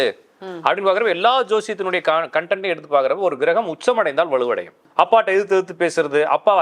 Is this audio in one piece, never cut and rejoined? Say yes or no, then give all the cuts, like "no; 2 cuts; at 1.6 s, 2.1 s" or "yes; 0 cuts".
no; 1 cut; at 4.8 s